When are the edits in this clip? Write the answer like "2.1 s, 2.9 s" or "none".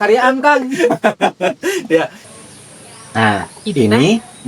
2.2 s